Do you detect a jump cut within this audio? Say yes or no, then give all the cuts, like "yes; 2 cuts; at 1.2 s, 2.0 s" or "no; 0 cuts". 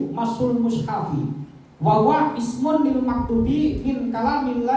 no; 0 cuts